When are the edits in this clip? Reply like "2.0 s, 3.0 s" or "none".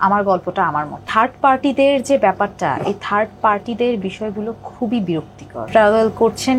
1.1 s, 5.6 s